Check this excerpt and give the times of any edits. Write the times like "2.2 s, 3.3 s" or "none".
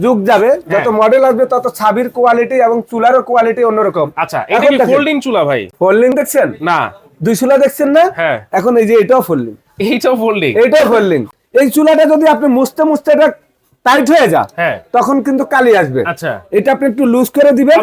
5.7 s, 11.3 s